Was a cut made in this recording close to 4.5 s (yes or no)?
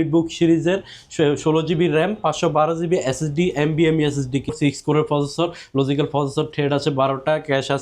yes